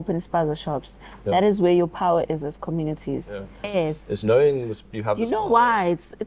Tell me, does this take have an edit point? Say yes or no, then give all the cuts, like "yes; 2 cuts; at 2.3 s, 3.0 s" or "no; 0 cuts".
yes; 1 cut; at 3.7 s